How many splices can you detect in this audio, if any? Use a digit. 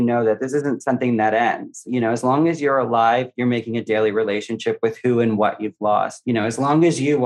1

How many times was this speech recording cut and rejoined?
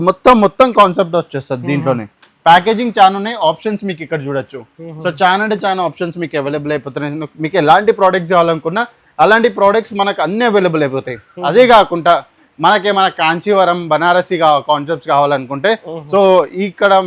0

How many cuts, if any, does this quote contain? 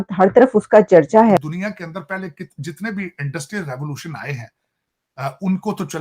1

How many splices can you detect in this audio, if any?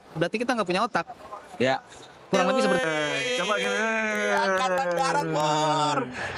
1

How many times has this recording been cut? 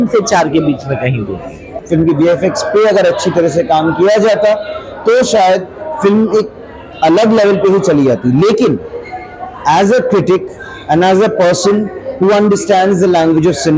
1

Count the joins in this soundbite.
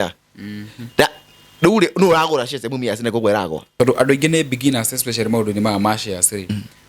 1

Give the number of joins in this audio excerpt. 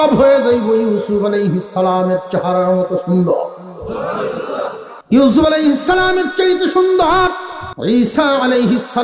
0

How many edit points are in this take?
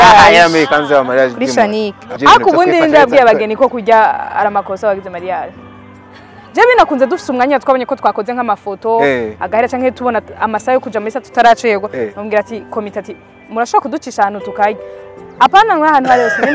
1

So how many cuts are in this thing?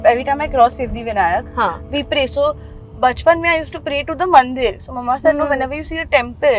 0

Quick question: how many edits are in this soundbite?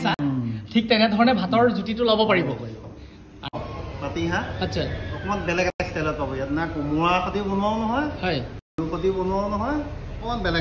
1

